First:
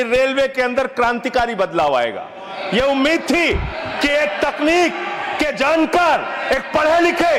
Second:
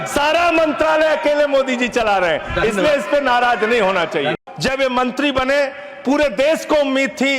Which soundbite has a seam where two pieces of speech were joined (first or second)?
second